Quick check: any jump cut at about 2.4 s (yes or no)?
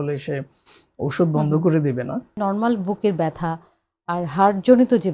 yes